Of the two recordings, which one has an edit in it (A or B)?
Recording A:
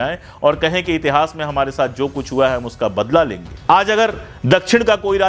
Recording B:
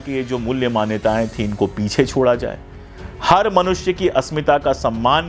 A